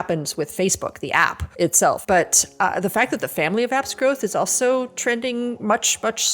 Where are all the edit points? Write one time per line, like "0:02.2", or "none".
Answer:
0:01.8